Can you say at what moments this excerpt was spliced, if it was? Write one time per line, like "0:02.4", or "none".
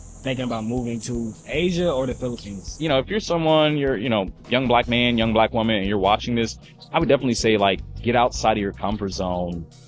0:02.8